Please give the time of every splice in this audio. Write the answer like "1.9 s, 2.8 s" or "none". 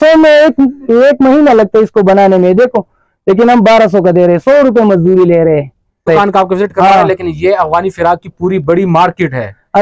6.1 s